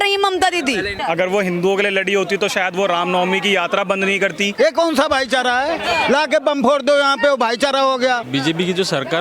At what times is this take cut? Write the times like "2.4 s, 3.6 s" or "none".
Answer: 0.9 s, 4.5 s, 8.3 s

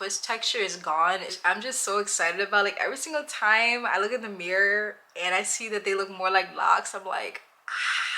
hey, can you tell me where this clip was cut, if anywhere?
1.3 s

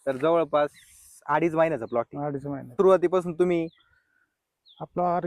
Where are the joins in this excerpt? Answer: 2.7 s

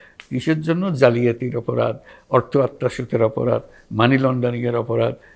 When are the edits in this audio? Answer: none

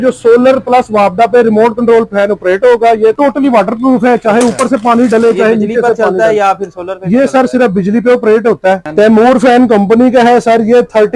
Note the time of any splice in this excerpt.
3.2 s, 8.8 s

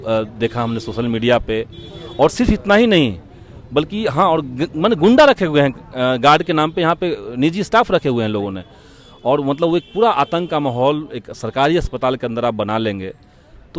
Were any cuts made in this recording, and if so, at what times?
none

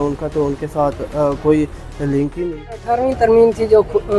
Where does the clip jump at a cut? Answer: 2.4 s

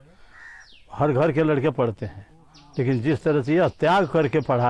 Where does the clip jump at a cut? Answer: none

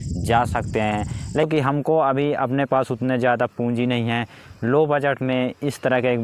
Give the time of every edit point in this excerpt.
1.5 s

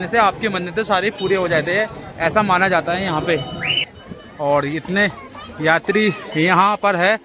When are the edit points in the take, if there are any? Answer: 3.8 s

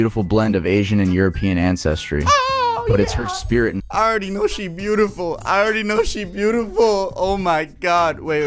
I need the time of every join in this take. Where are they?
3.8 s

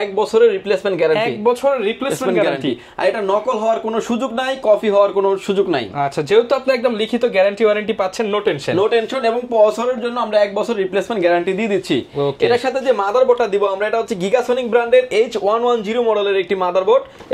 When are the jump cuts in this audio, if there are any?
none

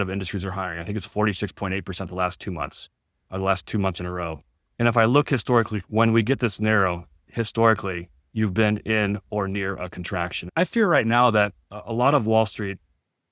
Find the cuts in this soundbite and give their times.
4.6 s, 5.8 s, 10.4 s

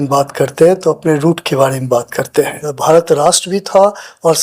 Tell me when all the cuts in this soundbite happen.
2.7 s

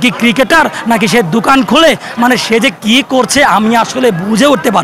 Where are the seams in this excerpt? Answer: none

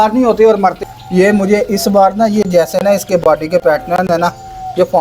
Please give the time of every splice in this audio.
0.9 s

